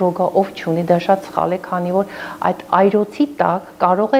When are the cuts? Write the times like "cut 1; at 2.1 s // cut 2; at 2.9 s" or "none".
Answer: none